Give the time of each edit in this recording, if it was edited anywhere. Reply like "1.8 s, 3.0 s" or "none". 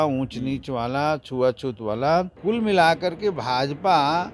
2.3 s